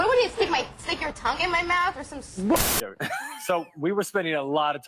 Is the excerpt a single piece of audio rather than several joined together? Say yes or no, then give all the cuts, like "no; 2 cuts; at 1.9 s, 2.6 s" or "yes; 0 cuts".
no; 1 cut; at 2.6 s